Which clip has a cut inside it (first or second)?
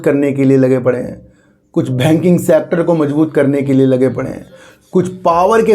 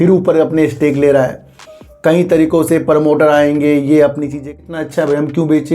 second